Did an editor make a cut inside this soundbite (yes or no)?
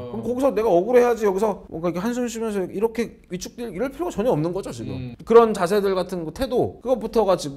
no